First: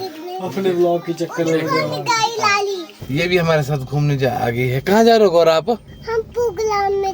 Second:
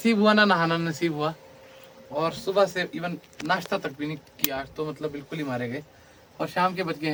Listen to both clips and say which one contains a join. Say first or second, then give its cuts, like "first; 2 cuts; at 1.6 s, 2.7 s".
first; 2 cuts; at 2.9 s, 6.0 s